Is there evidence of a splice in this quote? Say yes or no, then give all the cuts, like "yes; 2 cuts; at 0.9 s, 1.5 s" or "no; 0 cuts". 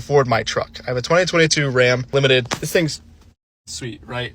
yes; 1 cut; at 2.0 s